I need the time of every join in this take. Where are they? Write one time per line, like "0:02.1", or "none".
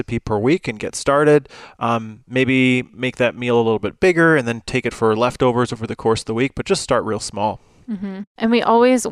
none